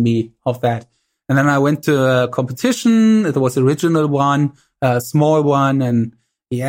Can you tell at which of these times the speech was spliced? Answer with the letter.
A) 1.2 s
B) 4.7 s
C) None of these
C